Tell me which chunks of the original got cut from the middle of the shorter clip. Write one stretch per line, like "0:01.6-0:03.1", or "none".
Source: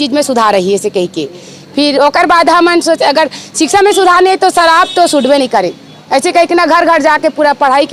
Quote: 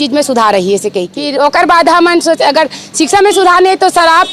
0:01.2-0:01.8